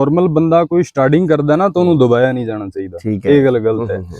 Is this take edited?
no; 0 cuts

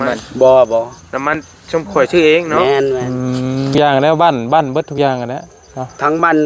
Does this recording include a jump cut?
yes; 1 cut; at 3.7 s

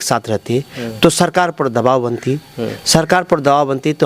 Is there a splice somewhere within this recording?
no; 0 cuts

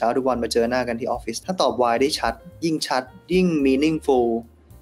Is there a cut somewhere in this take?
yes; 1 cut; at 1.4 s

